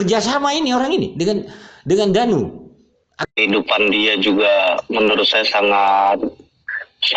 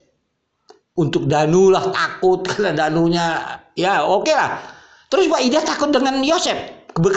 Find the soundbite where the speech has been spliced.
first; 1 cut; at 3.3 s

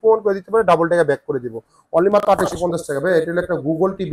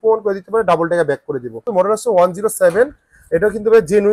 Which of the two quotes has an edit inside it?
second; 1 cut; at 1.7 s

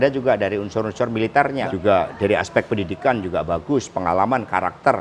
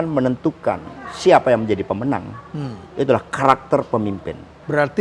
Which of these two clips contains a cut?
first; 1 cut; at 1.6 s

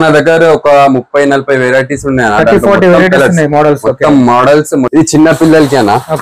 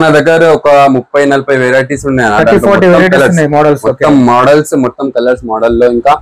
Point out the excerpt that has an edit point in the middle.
first; 1 cut; at 4.9 s

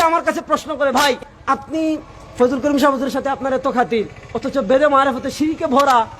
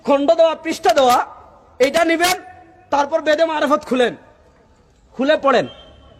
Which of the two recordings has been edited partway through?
first; 1 cut; at 1.3 s

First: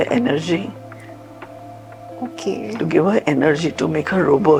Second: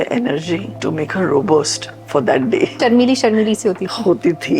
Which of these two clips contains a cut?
second; 2 cuts; at 0.8 s, 2.8 s

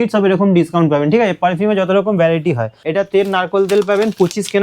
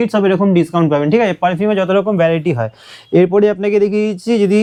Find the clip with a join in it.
first; 1 cut; at 2.7 s

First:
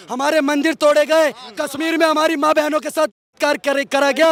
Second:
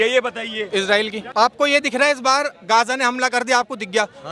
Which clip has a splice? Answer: second; 1 cut; at 1.2 s

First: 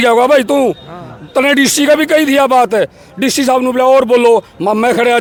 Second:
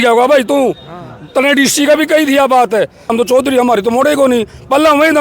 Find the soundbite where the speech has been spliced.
second; 1 cut; at 3.1 s

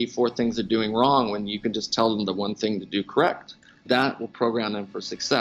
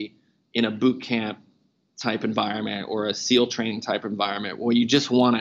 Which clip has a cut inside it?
first; 1 cut; at 3.8 s

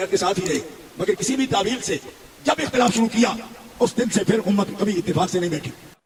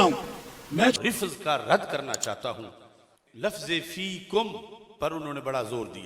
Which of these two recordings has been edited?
second; 1 cut; at 0.9 s

